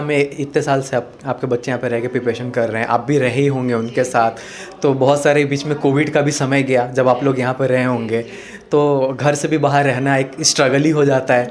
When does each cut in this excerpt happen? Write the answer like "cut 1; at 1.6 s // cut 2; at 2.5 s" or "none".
none

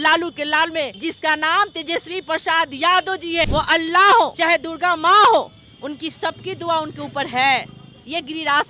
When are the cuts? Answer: cut 1; at 0.9 s // cut 2; at 3.5 s // cut 3; at 4.4 s

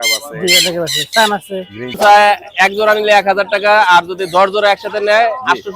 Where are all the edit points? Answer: cut 1; at 2.0 s

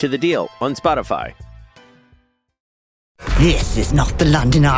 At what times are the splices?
cut 1; at 3.1 s

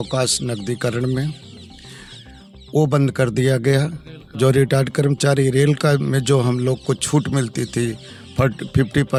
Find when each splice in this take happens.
none

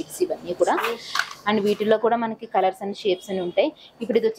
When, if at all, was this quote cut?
none

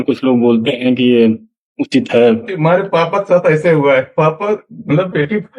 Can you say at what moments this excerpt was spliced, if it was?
cut 1; at 2.5 s // cut 2; at 4.1 s

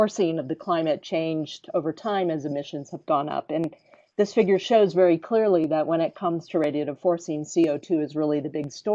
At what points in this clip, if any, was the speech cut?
cut 1; at 7.5 s

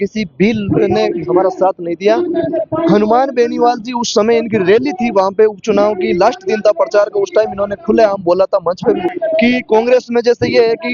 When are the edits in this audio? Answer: cut 1; at 9.1 s

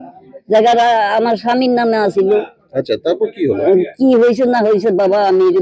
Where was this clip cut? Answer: none

